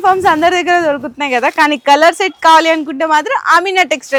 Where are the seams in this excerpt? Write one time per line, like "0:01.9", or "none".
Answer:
none